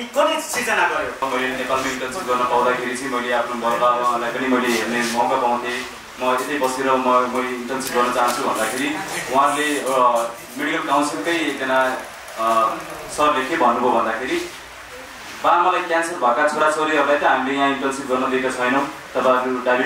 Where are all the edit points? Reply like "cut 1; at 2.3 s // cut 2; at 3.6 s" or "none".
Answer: cut 1; at 1.2 s